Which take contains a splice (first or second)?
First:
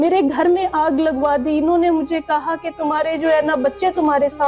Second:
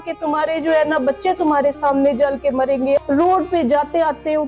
second